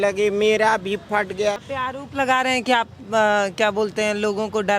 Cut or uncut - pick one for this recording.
cut